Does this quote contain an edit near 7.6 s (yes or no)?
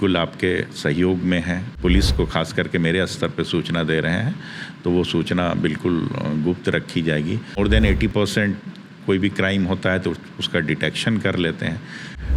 yes